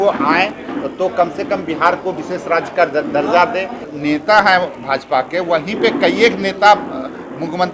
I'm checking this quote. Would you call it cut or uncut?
cut